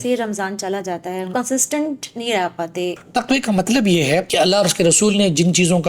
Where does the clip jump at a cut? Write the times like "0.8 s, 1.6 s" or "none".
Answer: 1.3 s, 3.0 s, 4.3 s